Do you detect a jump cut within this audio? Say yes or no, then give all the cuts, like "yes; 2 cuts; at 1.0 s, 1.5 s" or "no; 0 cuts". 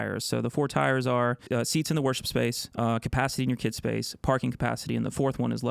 yes; 2 cuts; at 1.4 s, 2.6 s